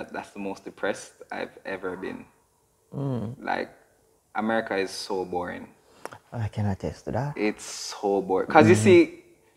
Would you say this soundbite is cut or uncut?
uncut